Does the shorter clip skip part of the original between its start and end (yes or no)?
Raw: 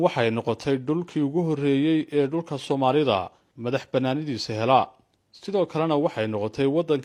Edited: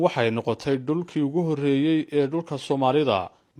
no